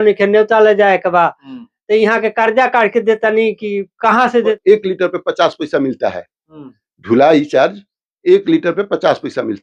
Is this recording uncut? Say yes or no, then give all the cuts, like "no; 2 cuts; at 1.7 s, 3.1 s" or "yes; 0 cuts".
no; 1 cut; at 4.6 s